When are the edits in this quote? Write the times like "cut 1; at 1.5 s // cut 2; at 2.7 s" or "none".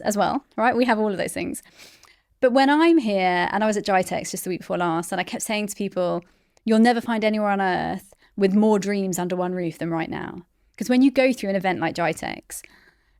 none